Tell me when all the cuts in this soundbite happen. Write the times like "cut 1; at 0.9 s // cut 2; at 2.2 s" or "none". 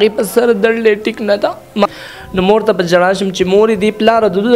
cut 1; at 1.9 s